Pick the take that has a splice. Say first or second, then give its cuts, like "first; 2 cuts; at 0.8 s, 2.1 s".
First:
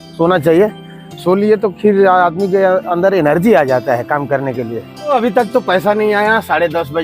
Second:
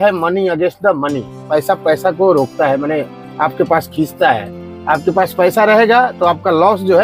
first; 1 cut; at 5.1 s